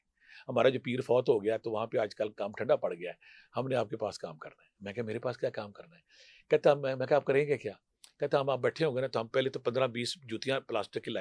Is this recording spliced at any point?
no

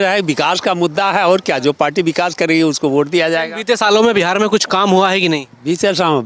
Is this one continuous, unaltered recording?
yes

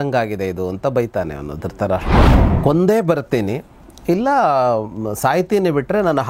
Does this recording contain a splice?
yes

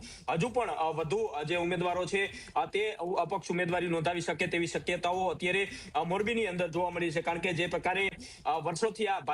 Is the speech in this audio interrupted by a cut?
no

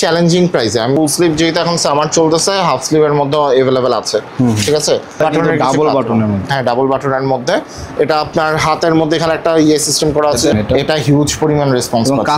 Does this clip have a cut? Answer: yes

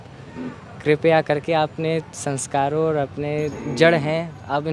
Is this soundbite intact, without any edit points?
no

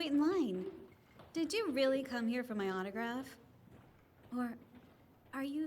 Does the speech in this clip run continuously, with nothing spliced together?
no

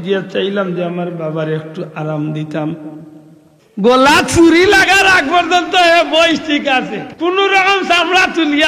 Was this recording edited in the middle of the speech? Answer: yes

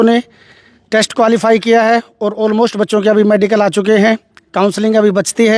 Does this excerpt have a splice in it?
no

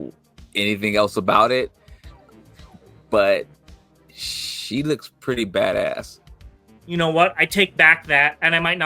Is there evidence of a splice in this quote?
yes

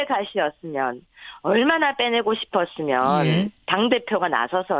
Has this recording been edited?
yes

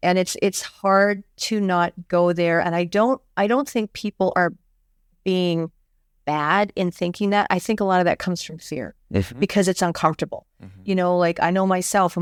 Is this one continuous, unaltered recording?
yes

